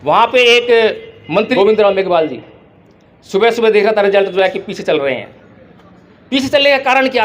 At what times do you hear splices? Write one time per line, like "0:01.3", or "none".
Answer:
0:01.5